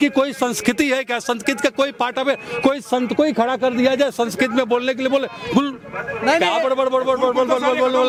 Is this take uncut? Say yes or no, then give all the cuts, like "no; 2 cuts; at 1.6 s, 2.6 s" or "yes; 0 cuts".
yes; 0 cuts